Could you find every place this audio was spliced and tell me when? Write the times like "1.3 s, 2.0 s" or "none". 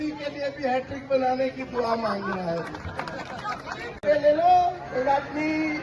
4.1 s